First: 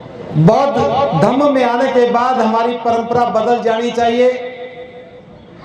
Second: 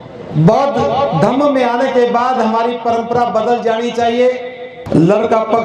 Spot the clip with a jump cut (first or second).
second